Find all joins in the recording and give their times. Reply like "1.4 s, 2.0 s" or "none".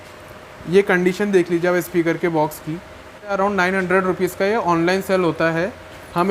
3.3 s